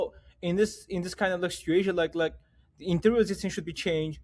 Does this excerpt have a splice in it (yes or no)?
no